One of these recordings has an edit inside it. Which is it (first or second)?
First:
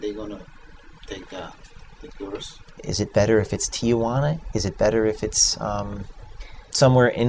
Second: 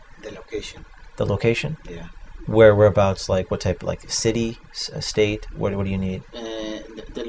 first